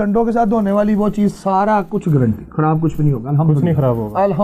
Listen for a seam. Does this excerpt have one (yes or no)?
no